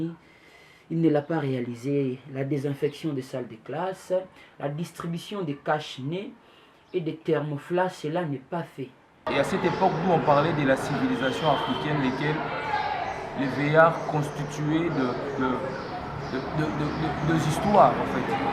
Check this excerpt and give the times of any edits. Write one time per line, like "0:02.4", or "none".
0:09.2

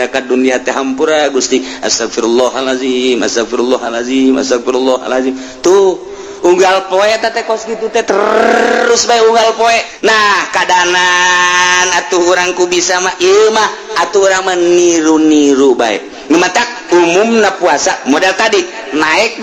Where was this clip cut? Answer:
0:09.9

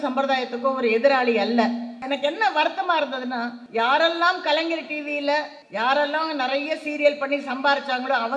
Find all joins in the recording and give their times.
0:02.0
0:03.6
0:05.6

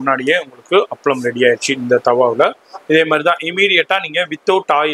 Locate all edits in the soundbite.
none

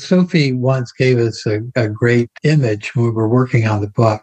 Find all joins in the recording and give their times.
0:02.3

